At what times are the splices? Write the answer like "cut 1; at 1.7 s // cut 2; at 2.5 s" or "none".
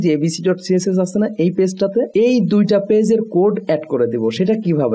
cut 1; at 2.1 s

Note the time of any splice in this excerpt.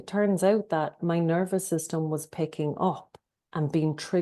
cut 1; at 1.0 s

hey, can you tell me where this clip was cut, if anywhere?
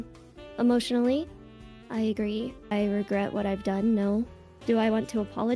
cut 1; at 2.7 s // cut 2; at 4.4 s

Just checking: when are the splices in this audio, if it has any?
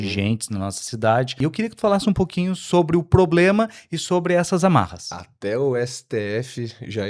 cut 1; at 1.4 s

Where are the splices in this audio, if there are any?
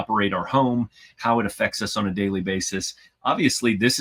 none

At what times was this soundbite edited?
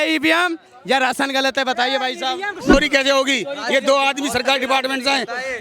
cut 1; at 2.7 s

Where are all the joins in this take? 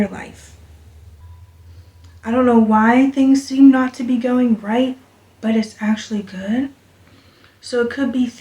cut 1; at 1.2 s

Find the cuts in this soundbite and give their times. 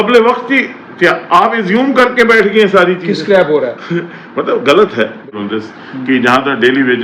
cut 1; at 5.4 s

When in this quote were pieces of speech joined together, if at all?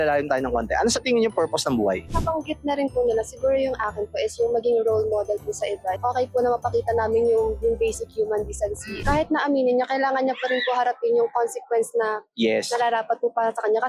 cut 1; at 2.0 s // cut 2; at 6.0 s // cut 3; at 8.9 s

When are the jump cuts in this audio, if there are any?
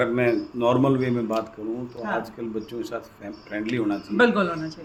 none

